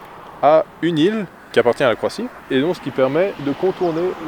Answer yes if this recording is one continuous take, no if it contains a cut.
no